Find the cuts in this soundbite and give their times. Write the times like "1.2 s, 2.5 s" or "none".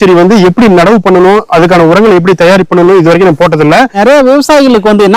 4.0 s